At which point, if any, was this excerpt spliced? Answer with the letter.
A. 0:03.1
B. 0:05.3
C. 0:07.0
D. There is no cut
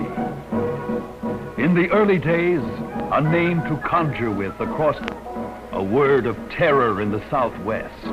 D